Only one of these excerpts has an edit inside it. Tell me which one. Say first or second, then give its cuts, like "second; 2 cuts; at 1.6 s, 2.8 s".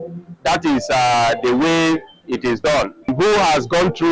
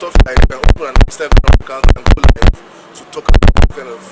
first; 1 cut; at 3.1 s